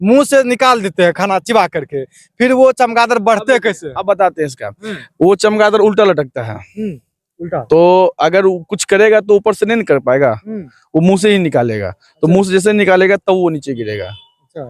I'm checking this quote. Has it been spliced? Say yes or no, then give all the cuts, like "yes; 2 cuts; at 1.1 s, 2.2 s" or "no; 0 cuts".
no; 0 cuts